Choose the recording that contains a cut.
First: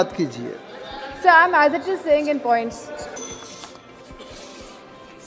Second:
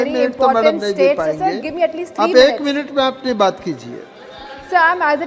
first; 1 cut; at 3.2 s

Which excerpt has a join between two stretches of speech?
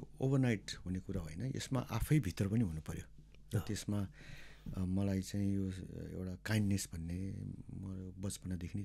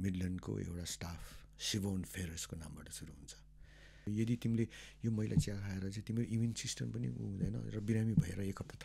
second; 1 cut; at 4.1 s

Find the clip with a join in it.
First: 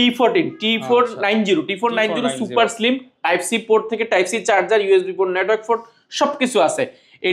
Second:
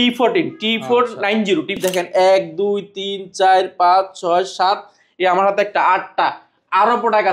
second; 1 cut; at 1.8 s

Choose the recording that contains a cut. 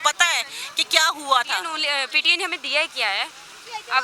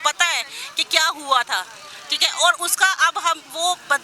first; 1 cut; at 1.7 s

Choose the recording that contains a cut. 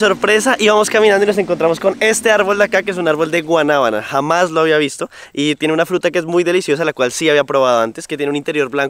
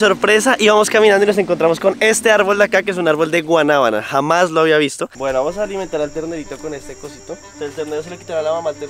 second; 2 cuts; at 5.1 s, 7.5 s

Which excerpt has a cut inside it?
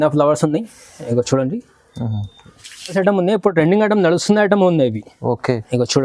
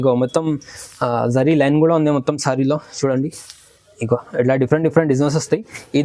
first; 1 cut; at 2.9 s

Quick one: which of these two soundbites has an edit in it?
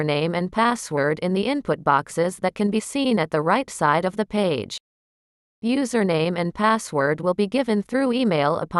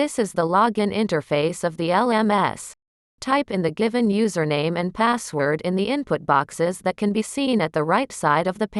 second; 1 cut; at 0.9 s

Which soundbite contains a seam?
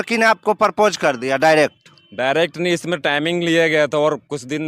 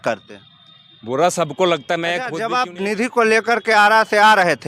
second; 1 cut; at 2.3 s

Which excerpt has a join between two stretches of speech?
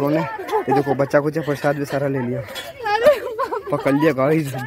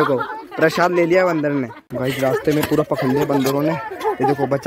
second; 1 cut; at 1.8 s

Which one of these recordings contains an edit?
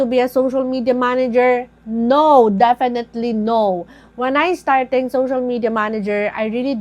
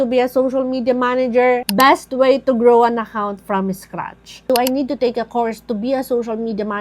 second; 2 cuts; at 1.8 s, 4.5 s

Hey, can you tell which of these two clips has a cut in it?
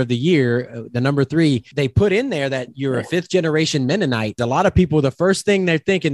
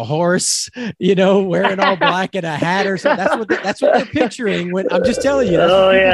first; 2 cuts; at 1.7 s, 4.3 s

